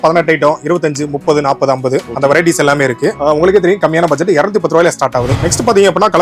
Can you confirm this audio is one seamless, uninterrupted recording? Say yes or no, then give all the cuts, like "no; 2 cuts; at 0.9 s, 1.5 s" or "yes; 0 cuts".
yes; 0 cuts